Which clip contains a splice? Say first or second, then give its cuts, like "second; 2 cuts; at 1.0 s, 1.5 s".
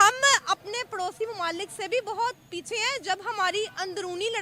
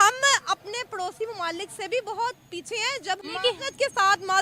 second; 1 cut; at 3.2 s